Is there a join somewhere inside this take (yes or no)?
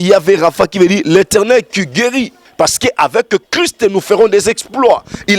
yes